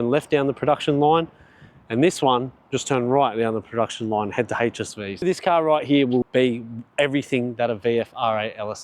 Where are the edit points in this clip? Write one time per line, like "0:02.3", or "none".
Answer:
0:05.2
0:06.3